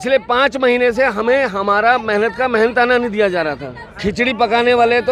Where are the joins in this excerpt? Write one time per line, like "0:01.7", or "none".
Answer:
none